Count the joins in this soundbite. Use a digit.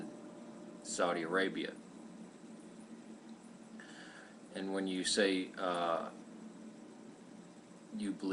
1